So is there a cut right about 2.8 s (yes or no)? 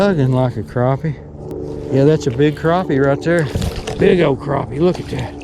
no